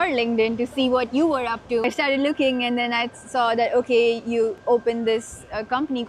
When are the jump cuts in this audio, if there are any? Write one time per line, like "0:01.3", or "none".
0:01.8
0:04.6